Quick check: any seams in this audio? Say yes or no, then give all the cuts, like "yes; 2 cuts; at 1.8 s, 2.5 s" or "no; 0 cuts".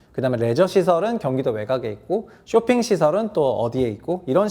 no; 0 cuts